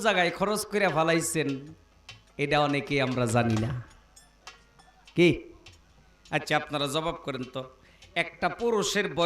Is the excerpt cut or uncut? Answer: uncut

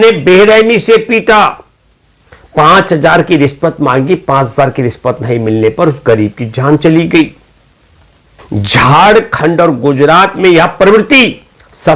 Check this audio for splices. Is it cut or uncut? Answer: uncut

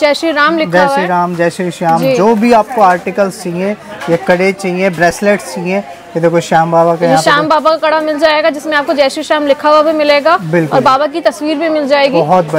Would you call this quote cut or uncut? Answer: uncut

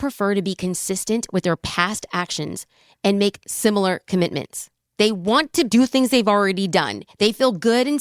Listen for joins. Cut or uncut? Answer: cut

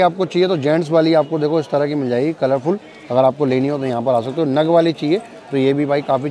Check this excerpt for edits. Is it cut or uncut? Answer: uncut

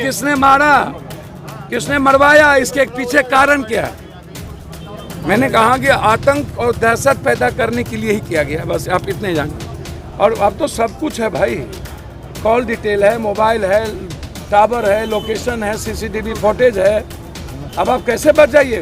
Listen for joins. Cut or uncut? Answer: cut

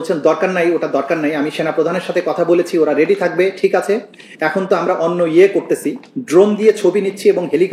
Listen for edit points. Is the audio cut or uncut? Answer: uncut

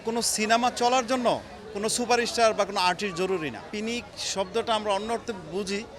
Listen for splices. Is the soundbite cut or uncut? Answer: cut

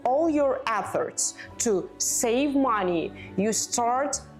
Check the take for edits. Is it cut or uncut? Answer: uncut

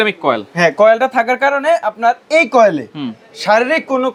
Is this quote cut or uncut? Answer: uncut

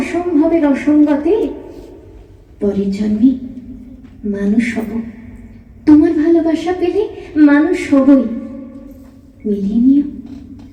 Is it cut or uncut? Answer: uncut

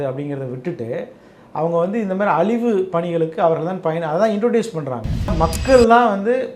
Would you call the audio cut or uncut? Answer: cut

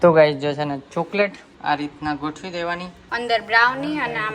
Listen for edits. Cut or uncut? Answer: cut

